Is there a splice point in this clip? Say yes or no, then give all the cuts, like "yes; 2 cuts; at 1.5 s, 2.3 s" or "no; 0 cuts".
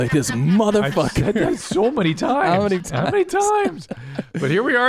yes; 1 cut; at 2.9 s